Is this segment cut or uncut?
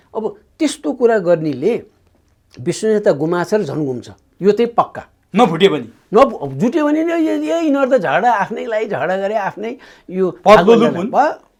uncut